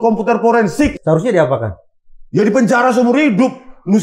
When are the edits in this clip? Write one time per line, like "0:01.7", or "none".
0:01.0